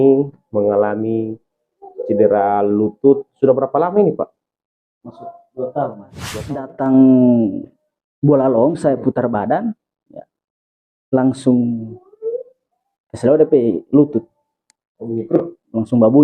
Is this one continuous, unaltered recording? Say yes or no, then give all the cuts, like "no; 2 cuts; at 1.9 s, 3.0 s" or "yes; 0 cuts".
no; 1 cut; at 6.2 s